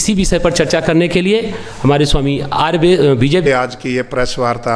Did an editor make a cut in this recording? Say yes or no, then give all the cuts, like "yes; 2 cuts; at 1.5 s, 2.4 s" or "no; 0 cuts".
yes; 1 cut; at 3.5 s